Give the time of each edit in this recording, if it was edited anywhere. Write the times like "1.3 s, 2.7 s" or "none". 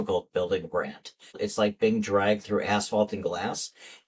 1.2 s